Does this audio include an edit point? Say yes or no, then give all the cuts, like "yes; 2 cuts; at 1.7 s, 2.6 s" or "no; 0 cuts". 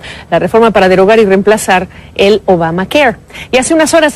no; 0 cuts